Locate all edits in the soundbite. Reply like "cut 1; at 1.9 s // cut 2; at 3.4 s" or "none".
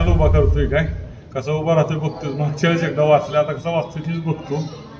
none